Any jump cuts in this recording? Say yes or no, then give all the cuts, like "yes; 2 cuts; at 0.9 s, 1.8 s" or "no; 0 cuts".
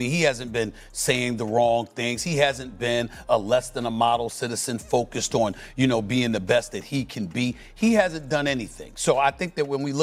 no; 0 cuts